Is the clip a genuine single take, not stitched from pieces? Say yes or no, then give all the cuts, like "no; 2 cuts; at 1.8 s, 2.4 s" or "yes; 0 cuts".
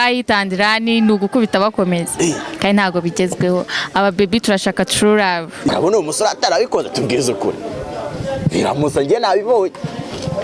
no; 1 cut; at 5.7 s